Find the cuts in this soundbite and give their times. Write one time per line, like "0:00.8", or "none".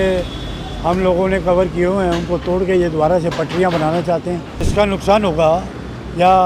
0:04.5